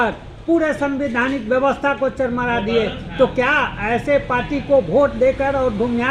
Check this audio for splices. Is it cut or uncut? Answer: uncut